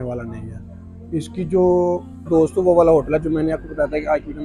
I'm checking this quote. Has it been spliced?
yes; 1 cut; at 2.3 s

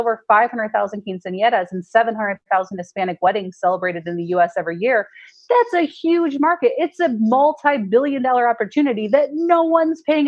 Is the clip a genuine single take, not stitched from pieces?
yes; 0 cuts

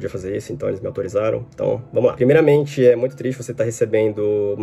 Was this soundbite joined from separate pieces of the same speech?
no; 0 cuts

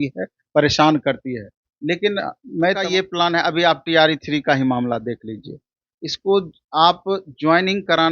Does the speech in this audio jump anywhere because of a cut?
yes; 1 cut; at 2.8 s

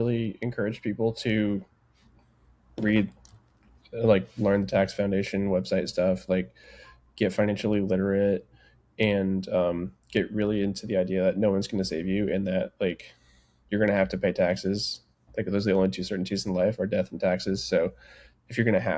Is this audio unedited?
yes; 0 cuts

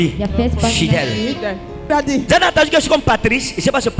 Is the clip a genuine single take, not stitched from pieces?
no; 1 cut; at 1.8 s

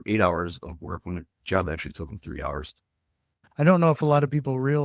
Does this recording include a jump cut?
yes; 1 cut; at 3.5 s

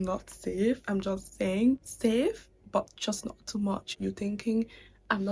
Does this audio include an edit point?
yes; 2 cuts; at 1.9 s, 4.0 s

